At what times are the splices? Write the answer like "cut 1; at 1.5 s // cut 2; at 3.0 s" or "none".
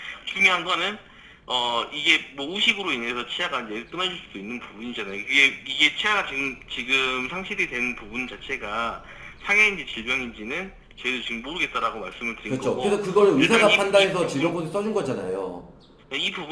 none